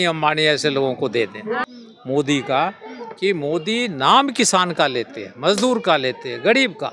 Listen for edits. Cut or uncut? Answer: cut